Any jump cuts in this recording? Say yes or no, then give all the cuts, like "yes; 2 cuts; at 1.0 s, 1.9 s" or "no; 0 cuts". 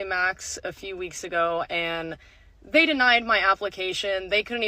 yes; 1 cut; at 3.2 s